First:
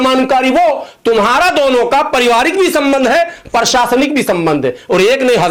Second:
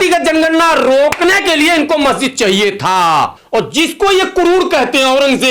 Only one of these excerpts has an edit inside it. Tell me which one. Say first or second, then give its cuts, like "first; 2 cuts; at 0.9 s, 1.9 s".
second; 1 cut; at 3.4 s